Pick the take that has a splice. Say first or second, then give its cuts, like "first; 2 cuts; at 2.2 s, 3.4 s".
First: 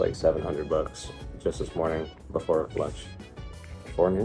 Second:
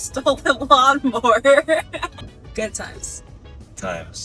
second; 1 cut; at 2.2 s